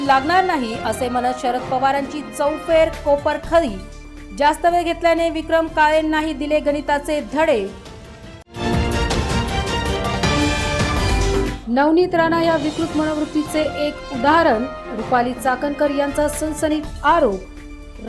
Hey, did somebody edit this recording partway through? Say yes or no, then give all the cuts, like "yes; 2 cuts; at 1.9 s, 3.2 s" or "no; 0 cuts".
no; 0 cuts